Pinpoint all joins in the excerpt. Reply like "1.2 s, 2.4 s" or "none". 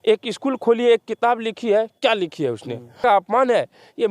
3.0 s